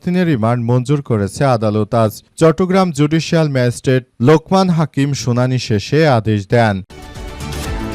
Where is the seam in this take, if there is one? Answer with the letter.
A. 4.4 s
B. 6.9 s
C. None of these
B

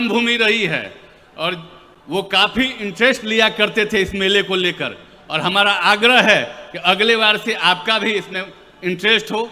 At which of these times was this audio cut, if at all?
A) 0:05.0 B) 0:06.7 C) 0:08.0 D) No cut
D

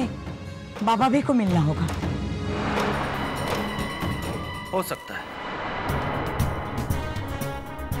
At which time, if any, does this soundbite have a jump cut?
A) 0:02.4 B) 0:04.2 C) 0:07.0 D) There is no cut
B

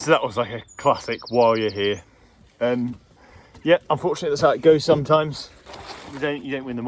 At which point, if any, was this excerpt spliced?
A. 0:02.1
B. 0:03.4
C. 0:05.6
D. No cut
D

